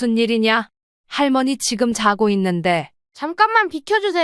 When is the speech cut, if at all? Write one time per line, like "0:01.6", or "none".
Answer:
0:03.0